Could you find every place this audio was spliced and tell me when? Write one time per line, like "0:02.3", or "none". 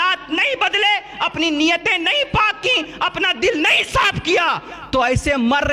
none